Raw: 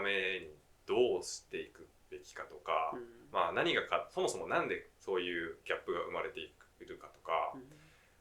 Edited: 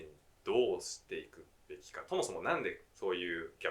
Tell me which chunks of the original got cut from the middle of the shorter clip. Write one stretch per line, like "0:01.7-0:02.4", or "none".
0:02.4-0:04.1